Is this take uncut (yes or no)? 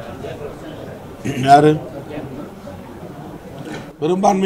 yes